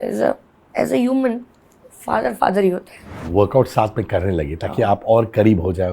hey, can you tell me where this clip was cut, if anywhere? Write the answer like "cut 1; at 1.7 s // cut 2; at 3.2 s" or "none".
cut 1; at 3.2 s